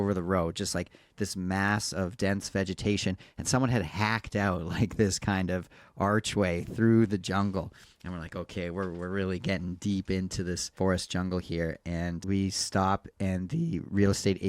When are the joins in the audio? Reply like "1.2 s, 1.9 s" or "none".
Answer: 10.7 s, 12.2 s